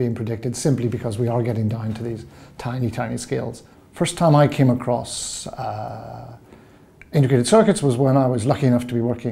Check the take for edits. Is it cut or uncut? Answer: cut